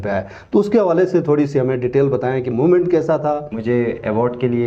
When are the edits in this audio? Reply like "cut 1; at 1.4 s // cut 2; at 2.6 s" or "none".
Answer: cut 1; at 3.5 s